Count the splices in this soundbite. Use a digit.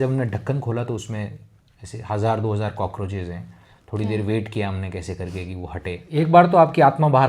1